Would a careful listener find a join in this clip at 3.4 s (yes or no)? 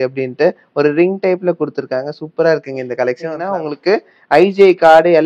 yes